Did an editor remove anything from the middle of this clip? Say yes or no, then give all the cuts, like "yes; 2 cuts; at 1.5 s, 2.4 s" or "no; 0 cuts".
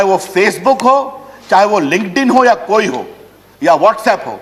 no; 0 cuts